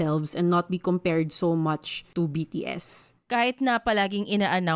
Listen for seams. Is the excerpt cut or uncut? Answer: cut